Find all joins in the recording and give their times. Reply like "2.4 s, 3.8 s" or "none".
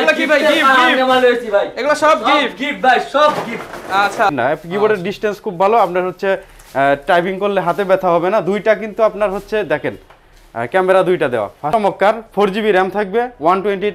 4.3 s, 11.7 s